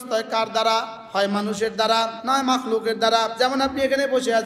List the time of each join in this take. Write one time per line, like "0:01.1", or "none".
0:01.0
0:02.2
0:03.3